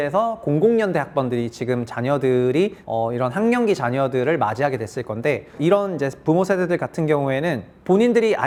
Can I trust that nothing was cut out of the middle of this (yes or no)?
yes